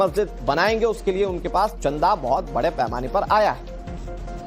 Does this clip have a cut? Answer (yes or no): yes